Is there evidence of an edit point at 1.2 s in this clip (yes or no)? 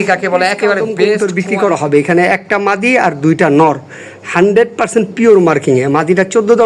yes